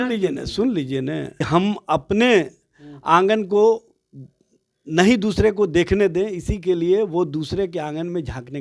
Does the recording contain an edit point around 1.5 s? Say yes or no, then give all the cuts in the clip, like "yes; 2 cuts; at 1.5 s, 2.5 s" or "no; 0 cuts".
yes; 1 cut; at 1.5 s